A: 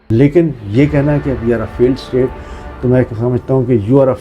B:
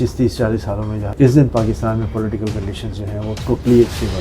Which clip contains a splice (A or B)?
B